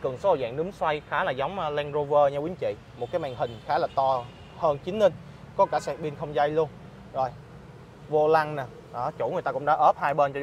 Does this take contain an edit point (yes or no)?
no